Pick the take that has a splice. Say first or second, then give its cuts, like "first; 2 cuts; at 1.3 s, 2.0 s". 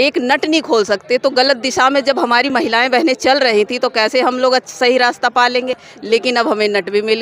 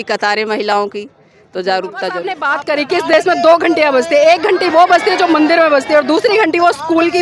second; 1 cut; at 2.5 s